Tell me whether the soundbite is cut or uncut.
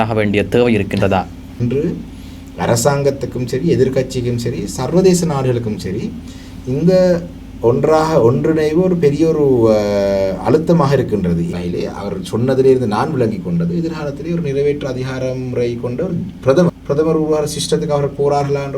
cut